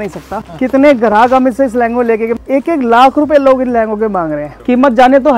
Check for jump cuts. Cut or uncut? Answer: cut